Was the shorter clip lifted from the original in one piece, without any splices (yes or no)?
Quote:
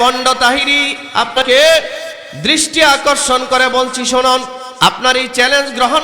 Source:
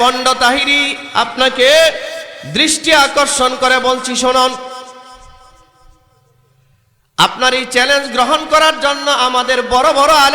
no